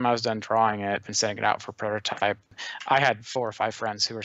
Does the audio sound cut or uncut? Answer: cut